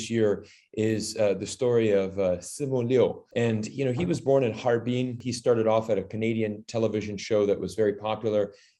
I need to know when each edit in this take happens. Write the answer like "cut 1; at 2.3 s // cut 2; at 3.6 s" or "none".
cut 1; at 5.2 s